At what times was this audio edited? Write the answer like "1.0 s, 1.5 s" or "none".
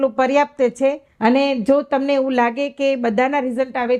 1.1 s